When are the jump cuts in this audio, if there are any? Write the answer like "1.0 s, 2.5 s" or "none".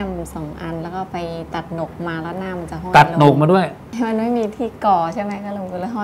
3.9 s